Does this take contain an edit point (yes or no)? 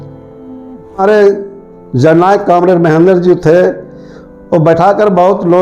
yes